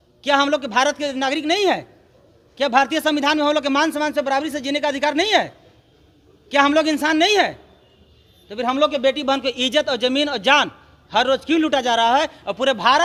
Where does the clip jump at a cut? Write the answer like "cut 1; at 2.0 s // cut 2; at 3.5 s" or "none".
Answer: none